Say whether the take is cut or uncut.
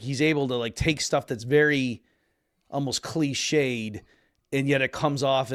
uncut